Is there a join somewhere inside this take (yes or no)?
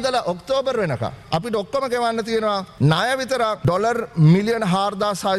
yes